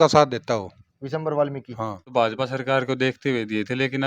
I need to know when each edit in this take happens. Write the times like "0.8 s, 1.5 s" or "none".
2.0 s